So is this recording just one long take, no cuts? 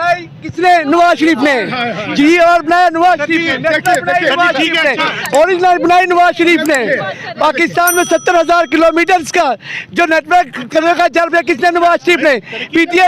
yes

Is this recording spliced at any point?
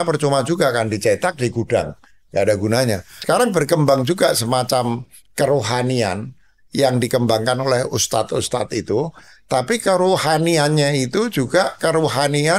yes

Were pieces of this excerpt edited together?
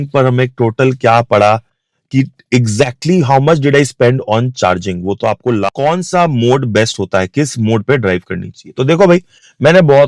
yes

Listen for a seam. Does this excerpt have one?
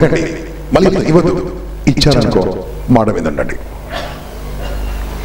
no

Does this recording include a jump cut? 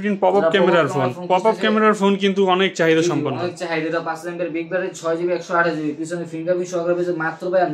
no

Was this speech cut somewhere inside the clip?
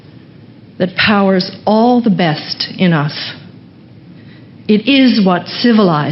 no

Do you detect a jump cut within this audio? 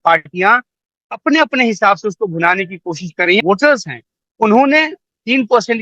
yes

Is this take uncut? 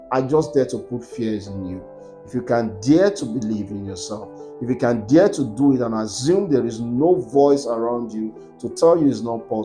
yes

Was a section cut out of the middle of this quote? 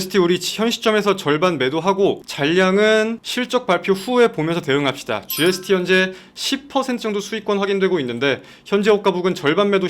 yes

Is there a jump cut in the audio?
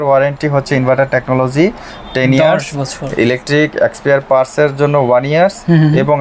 no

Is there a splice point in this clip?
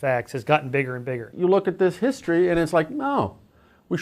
yes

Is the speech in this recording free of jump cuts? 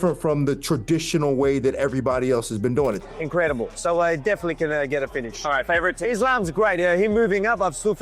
no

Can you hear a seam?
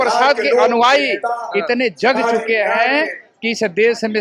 no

